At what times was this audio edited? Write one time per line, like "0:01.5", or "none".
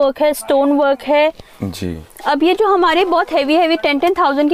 none